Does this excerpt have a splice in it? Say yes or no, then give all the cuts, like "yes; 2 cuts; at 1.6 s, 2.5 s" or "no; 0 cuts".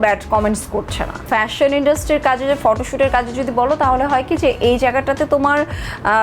yes; 1 cut; at 1.3 s